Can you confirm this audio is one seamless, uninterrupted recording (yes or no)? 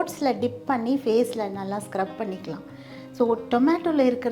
yes